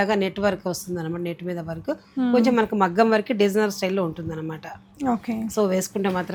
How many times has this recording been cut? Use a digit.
0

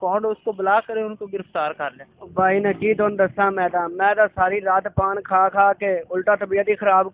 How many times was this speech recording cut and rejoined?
1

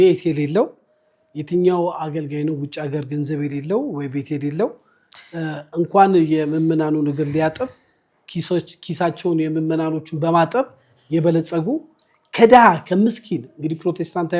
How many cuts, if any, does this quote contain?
0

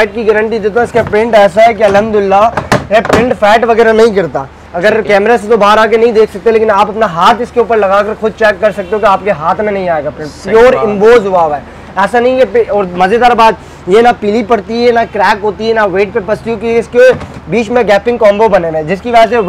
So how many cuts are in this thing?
0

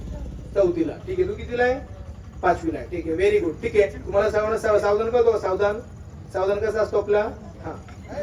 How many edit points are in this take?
0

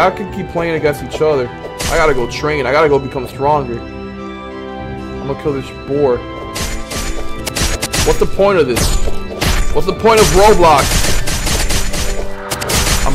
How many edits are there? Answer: 0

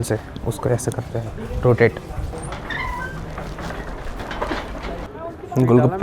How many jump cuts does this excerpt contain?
2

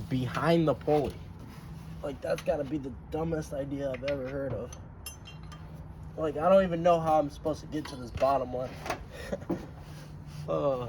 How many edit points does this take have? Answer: 0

